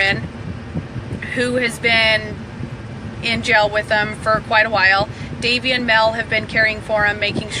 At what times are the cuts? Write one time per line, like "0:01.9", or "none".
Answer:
0:03.4

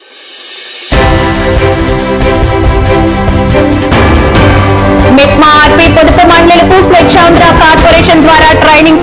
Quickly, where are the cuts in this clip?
0:05.1

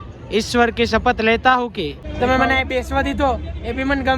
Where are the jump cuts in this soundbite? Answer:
0:02.0

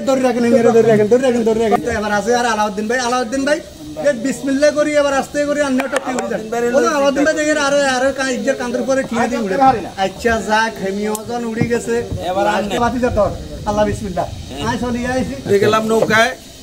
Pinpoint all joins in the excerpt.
0:01.8
0:12.8
0:15.4

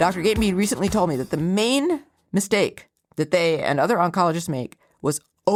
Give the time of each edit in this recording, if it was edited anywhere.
none

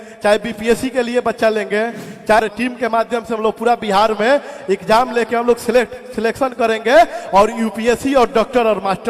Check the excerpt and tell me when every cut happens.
0:02.4

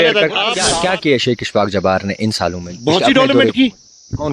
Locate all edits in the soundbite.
0:00.9

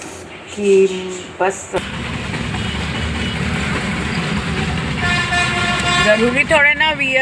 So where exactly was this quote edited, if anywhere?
0:01.8

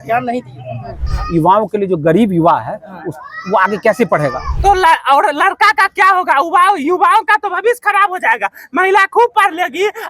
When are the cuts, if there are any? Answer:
0:01.2
0:04.5

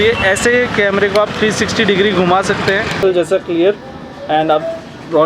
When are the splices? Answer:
0:03.0

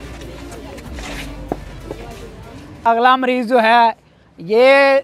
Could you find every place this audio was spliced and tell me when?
0:02.8

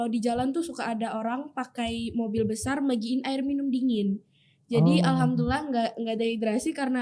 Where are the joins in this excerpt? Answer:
none

